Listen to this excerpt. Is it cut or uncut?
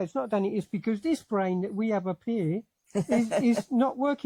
uncut